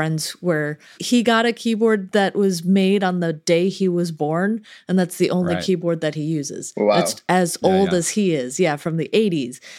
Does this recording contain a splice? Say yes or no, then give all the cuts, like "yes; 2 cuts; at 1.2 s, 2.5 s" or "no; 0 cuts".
yes; 1 cut; at 1.0 s